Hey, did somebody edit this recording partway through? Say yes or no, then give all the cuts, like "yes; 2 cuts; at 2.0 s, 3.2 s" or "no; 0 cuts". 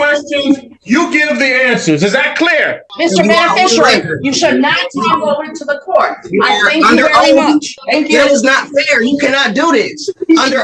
yes; 2 cuts; at 2.8 s, 7.8 s